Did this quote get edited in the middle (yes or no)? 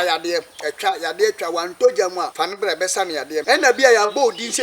yes